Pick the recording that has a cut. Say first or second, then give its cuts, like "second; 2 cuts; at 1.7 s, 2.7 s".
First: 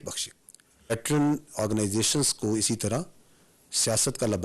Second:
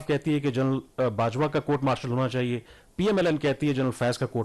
first; 1 cut; at 0.9 s